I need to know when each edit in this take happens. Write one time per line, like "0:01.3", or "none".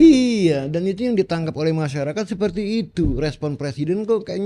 none